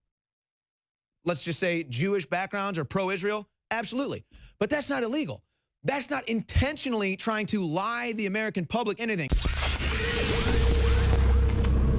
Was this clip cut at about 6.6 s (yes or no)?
no